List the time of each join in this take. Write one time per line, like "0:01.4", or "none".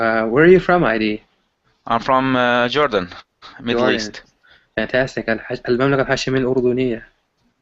0:03.2